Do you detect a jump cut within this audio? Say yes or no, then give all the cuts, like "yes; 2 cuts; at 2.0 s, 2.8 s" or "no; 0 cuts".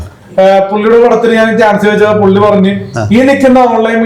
no; 0 cuts